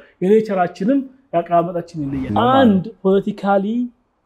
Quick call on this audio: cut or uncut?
cut